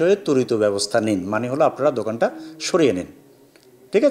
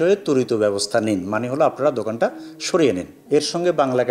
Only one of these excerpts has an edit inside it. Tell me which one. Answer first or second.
second